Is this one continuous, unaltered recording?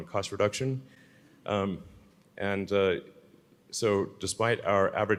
yes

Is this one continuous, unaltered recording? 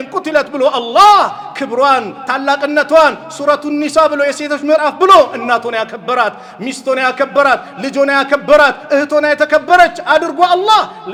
yes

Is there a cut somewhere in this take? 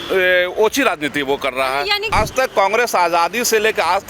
yes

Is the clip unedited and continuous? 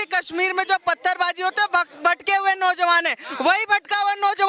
yes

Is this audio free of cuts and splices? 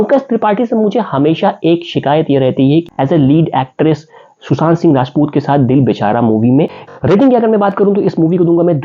no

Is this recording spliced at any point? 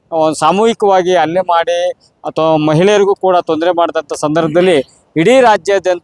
no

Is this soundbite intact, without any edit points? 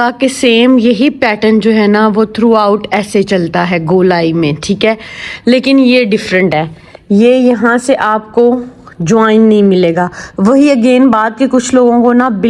yes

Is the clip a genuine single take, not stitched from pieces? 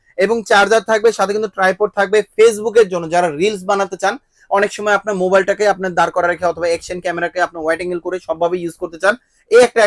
yes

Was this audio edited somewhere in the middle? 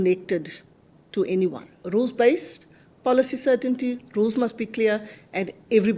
yes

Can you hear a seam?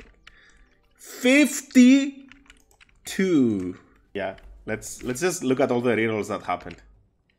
yes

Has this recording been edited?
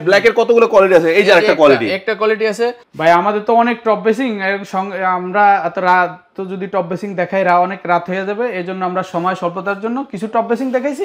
no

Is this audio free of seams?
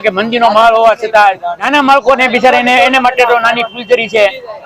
no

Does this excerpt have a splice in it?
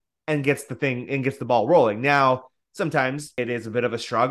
yes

